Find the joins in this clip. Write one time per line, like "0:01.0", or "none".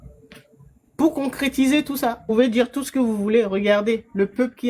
0:02.2